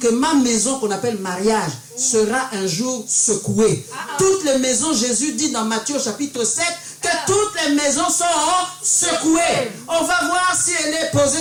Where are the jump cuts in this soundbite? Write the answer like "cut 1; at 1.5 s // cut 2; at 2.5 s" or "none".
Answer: none